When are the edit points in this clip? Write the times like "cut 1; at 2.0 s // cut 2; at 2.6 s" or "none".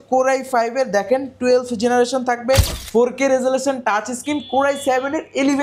cut 1; at 2.8 s